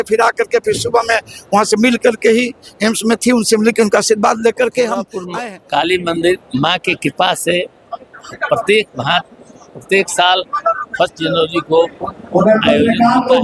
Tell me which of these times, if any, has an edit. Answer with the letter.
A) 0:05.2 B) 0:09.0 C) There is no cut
A